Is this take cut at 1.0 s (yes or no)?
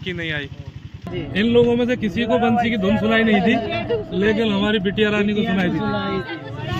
yes